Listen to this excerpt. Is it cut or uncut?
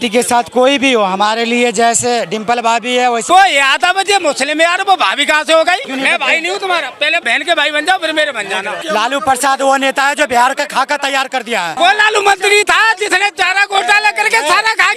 cut